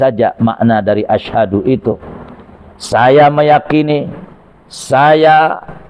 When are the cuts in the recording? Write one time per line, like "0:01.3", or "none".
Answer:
none